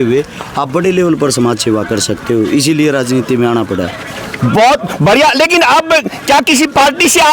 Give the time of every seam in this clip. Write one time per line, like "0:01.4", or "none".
none